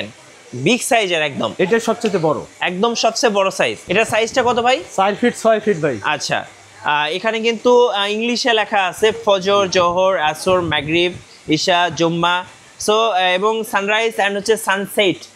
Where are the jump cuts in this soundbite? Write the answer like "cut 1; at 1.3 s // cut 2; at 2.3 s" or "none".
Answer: none